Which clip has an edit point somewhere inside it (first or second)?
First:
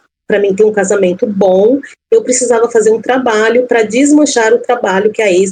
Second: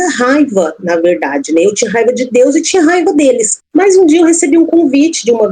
second